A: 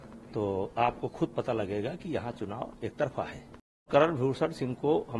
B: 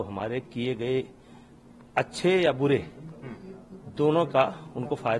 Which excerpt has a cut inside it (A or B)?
A